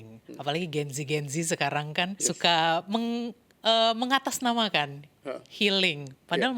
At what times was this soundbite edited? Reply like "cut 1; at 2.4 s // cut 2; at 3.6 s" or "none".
cut 1; at 2.2 s